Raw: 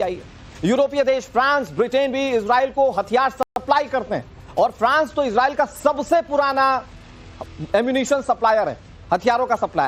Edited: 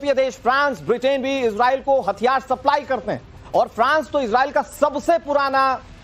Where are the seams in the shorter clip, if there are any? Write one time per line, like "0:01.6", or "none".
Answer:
0:02.6